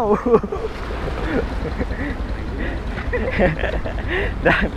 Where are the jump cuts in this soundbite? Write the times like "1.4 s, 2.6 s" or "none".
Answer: none